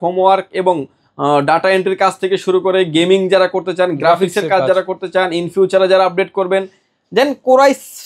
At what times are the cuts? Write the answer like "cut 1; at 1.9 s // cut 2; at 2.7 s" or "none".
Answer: none